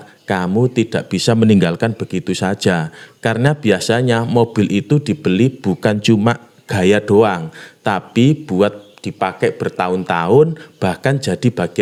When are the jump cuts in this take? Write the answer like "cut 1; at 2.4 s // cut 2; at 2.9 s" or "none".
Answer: none